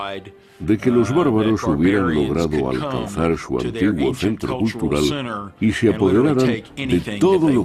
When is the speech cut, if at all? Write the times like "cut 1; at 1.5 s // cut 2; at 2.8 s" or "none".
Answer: none